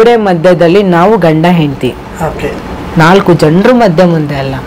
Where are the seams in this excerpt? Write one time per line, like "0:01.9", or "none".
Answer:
none